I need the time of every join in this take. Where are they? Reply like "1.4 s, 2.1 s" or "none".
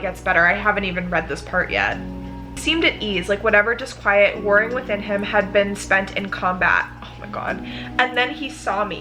2.5 s